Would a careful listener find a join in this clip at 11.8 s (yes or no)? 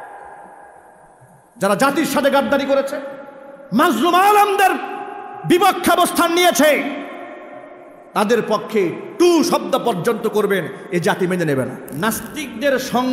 yes